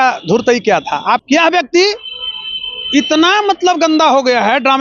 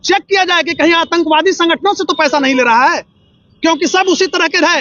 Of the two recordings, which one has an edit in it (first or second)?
first